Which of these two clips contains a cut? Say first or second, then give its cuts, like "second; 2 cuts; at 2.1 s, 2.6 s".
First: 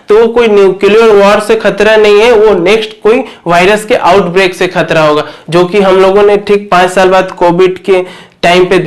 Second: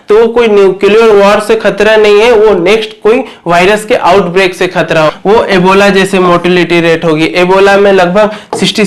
second; 1 cut; at 5.1 s